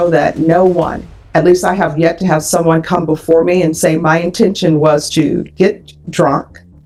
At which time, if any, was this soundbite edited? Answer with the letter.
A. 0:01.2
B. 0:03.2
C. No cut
C